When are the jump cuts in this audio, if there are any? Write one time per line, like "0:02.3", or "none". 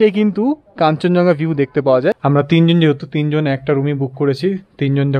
0:02.2